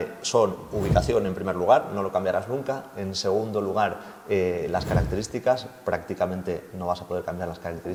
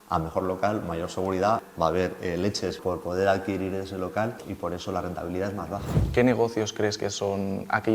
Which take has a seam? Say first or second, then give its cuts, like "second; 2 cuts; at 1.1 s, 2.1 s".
second; 4 cuts; at 1.7 s, 2.8 s, 4.4 s, 6.0 s